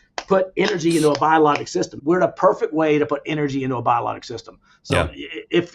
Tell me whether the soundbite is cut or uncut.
cut